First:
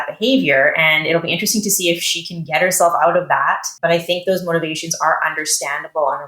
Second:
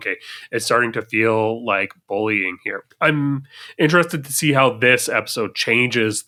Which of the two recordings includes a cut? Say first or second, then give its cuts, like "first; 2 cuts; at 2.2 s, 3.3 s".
first; 1 cut; at 3.7 s